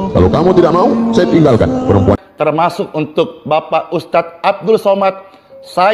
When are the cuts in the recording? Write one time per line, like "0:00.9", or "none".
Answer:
0:02.2